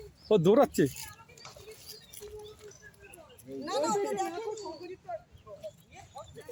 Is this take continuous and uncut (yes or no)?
yes